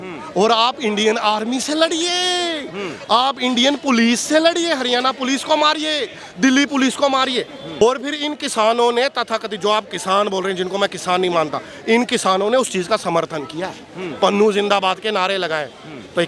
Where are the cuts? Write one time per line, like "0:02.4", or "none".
0:07.8